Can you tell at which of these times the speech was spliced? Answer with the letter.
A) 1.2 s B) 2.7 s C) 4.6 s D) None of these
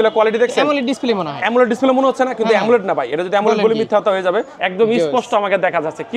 C